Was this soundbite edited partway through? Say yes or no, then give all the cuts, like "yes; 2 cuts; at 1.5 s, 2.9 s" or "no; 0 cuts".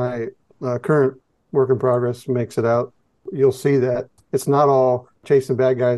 yes; 1 cut; at 4.1 s